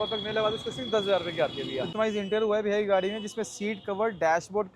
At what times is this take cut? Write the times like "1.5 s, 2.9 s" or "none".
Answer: 1.9 s